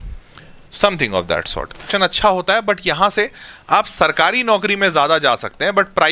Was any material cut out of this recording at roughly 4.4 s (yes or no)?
no